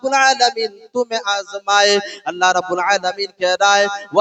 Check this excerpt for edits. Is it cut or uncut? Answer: uncut